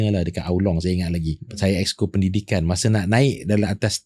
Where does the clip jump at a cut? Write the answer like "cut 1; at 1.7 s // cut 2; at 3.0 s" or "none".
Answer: cut 1; at 1.4 s